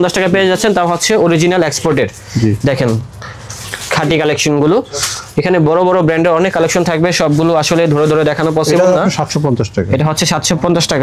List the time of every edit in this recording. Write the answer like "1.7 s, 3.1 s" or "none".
none

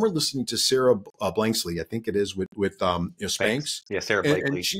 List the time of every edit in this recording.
none

